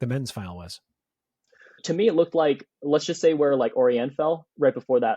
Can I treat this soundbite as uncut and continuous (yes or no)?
no